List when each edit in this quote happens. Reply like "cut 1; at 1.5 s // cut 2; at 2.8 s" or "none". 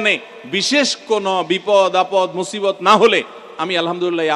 none